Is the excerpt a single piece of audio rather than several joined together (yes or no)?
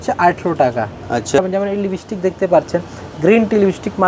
no